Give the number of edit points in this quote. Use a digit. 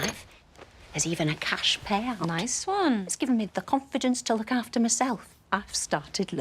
2